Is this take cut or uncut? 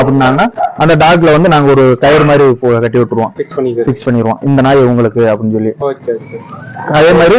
uncut